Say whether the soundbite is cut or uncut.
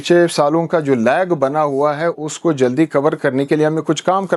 uncut